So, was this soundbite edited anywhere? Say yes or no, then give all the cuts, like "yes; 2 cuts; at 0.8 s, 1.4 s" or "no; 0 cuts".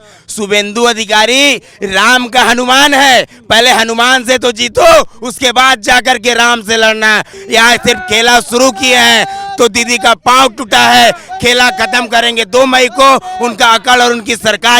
yes; 1 cut; at 7.3 s